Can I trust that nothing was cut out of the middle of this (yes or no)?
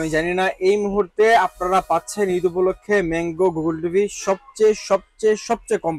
yes